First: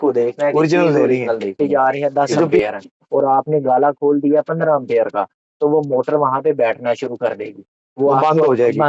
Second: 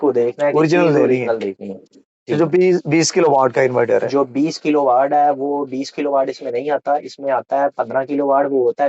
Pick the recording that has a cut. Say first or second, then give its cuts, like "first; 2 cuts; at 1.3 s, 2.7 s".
first; 1 cut; at 1.5 s